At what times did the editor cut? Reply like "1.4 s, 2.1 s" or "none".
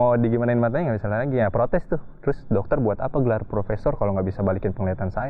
none